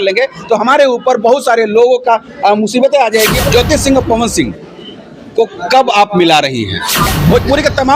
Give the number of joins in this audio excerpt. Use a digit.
2